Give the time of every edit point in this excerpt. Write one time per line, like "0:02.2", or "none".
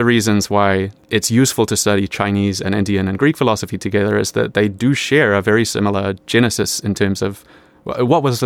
0:01.0